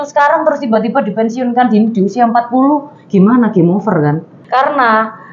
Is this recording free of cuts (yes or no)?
no